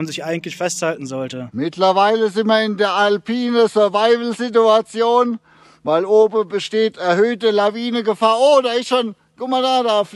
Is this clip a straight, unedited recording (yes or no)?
no